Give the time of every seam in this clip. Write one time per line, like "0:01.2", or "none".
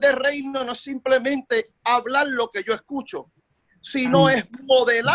none